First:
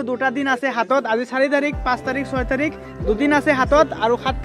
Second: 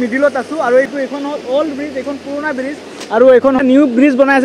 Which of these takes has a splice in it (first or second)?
second